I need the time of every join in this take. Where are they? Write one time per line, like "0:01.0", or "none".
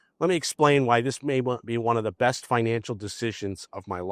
none